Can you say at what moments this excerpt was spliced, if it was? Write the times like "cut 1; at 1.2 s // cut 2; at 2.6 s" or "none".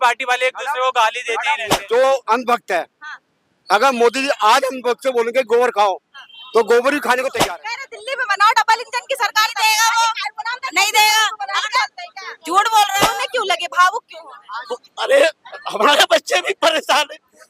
cut 1; at 1.7 s // cut 2; at 7.4 s // cut 3; at 13.1 s